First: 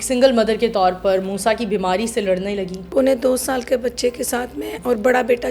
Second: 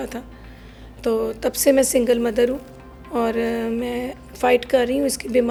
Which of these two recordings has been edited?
first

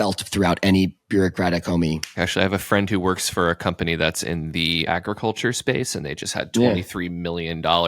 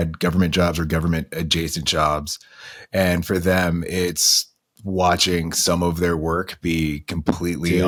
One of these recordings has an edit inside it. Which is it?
first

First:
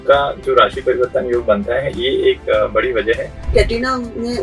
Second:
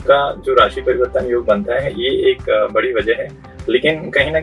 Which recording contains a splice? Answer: first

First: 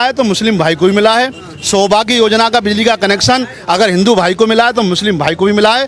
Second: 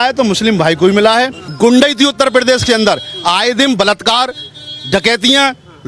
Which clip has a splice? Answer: second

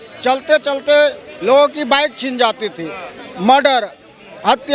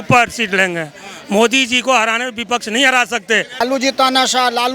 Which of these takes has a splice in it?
second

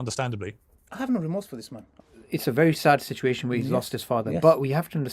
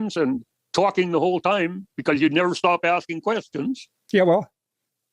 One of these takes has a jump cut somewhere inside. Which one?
first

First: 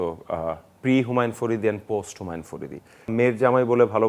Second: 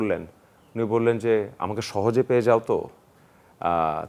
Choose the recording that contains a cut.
first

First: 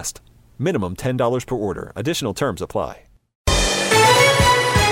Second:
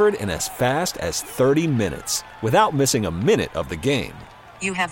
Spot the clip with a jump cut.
first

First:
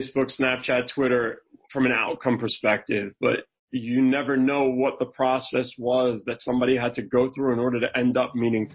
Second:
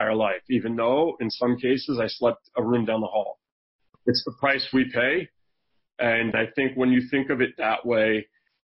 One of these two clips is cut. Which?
second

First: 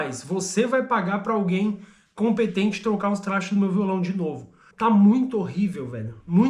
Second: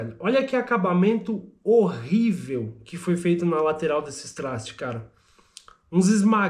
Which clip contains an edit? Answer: first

